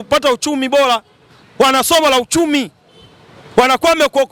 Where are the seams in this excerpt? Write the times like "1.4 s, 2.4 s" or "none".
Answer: none